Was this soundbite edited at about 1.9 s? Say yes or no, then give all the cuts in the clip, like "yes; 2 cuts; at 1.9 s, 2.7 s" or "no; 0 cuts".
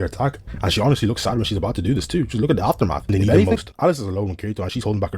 no; 1 cut; at 3.7 s